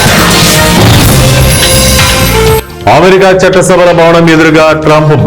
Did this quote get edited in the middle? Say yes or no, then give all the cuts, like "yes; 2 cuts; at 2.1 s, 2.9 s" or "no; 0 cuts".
yes; 1 cut; at 2.6 s